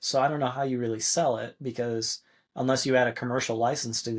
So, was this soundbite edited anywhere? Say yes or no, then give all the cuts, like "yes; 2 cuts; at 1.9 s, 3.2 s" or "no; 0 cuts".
no; 0 cuts